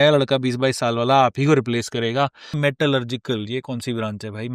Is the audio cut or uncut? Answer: cut